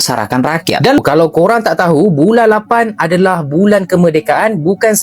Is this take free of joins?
no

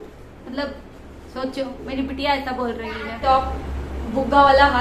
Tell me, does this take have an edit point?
yes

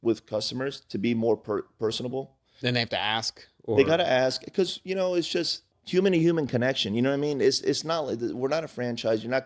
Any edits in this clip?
yes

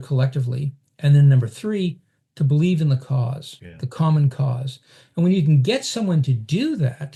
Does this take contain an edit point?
no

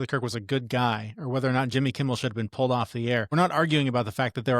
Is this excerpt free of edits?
no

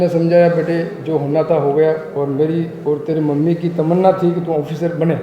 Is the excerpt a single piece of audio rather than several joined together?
yes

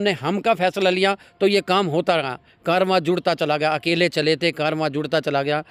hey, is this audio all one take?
yes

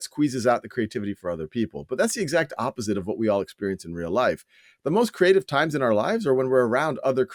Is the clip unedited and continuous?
yes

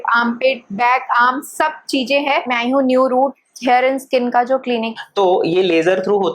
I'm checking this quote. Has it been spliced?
yes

